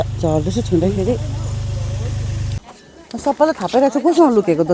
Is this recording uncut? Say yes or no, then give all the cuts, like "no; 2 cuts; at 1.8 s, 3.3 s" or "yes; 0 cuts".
no; 1 cut; at 2.6 s